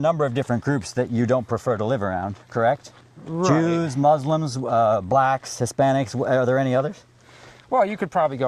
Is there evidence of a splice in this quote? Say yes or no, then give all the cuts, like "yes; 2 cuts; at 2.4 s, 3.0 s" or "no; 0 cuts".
no; 0 cuts